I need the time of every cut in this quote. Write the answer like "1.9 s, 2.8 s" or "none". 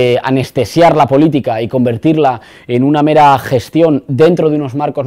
none

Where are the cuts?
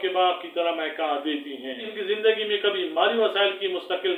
1.8 s

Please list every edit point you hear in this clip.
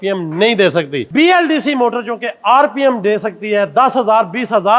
1.1 s

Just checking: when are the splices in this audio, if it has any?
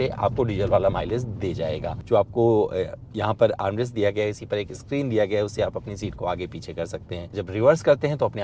2.0 s, 7.3 s

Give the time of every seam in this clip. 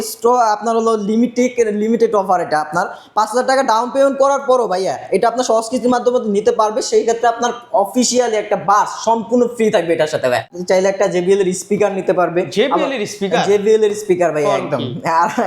10.5 s

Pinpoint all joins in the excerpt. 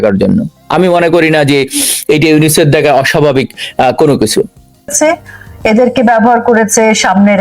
4.9 s

